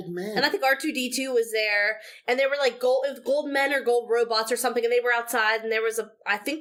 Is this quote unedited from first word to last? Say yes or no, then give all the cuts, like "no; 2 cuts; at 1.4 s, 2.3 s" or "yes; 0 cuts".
yes; 0 cuts